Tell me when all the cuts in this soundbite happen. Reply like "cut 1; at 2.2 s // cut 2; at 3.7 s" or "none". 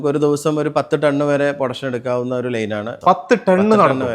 cut 1; at 3.0 s